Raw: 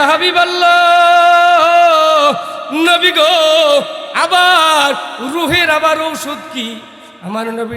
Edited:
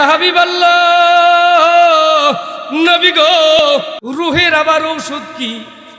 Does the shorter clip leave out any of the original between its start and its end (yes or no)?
yes